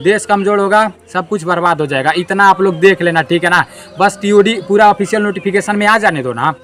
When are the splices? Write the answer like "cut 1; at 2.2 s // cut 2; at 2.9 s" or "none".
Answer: none